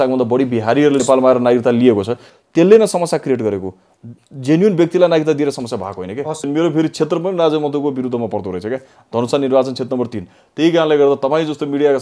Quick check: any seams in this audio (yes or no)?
yes